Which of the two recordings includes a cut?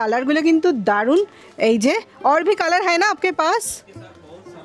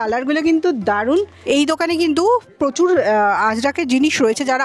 second; 1 cut; at 1.3 s

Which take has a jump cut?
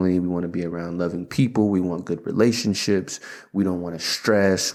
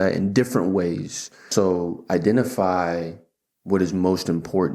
second; 1 cut; at 1.5 s

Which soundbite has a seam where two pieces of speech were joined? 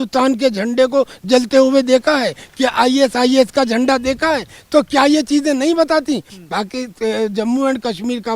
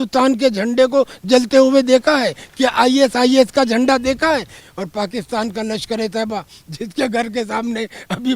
second; 1 cut; at 4.5 s

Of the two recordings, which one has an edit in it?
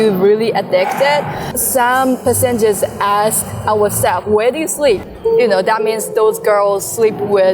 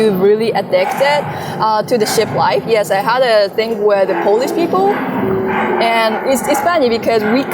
first; 2 cuts; at 1.5 s, 5.0 s

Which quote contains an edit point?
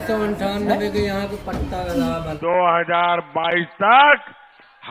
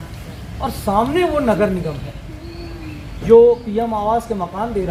first; 1 cut; at 2.3 s

